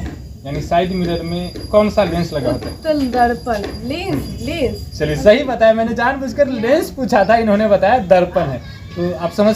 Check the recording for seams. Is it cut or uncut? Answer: uncut